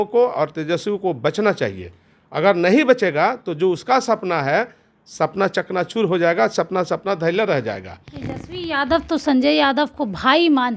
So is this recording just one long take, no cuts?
yes; 0 cuts

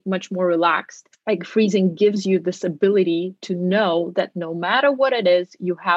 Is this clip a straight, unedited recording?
no; 1 cut; at 1.2 s

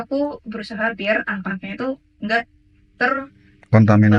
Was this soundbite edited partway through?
no; 0 cuts

